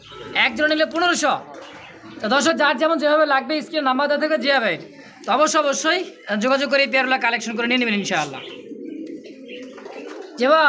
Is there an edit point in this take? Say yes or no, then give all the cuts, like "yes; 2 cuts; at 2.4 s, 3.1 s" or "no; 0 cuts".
no; 0 cuts